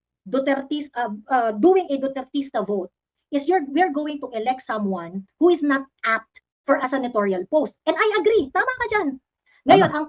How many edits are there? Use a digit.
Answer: 0